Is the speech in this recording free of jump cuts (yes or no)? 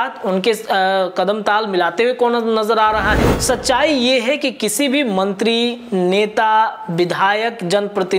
no